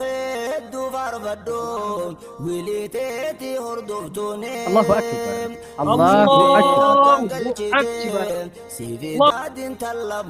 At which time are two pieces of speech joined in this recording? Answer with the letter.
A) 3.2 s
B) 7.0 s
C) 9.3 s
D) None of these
C